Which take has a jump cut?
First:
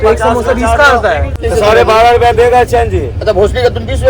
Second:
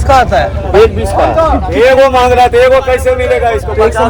first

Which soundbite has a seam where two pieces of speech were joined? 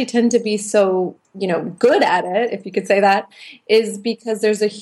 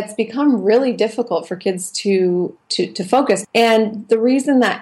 second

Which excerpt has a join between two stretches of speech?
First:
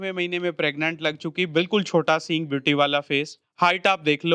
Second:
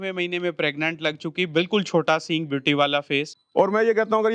second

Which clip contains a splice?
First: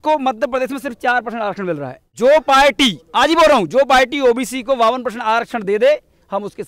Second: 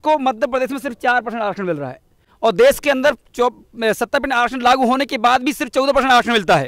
first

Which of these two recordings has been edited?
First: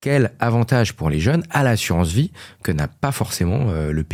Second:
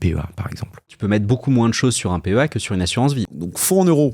second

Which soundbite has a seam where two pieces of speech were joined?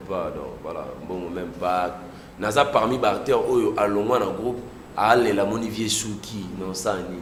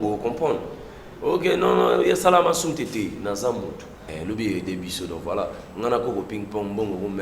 second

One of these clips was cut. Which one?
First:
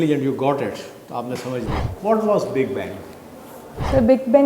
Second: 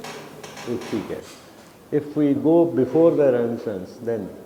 first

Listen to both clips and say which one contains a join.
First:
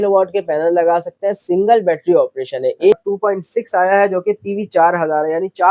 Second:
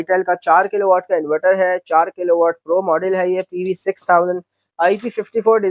first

